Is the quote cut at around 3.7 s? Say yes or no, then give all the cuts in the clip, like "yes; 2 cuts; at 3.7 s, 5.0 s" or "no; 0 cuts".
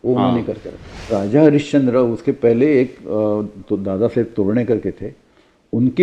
no; 1 cut; at 1.1 s